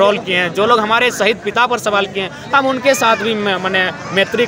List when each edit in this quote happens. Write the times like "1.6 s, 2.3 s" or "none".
none